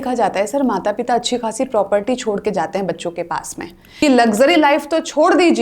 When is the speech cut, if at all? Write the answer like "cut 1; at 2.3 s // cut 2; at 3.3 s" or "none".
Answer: cut 1; at 3.8 s